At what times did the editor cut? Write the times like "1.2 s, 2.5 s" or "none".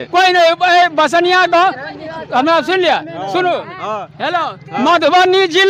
none